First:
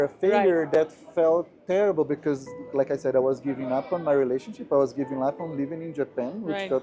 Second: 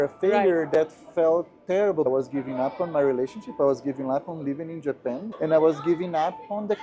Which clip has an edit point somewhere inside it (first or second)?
second